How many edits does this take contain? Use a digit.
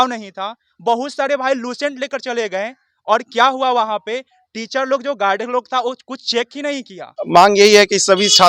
1